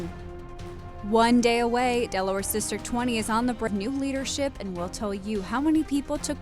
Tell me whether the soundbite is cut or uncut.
cut